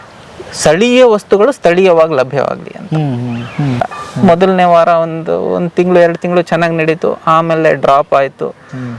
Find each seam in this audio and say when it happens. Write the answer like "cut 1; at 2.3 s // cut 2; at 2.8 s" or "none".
cut 1; at 3.8 s